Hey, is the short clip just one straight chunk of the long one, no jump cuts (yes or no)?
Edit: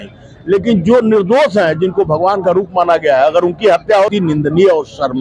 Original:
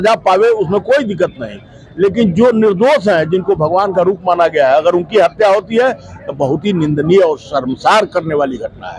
no